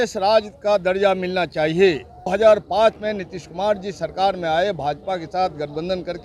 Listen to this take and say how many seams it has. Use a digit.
1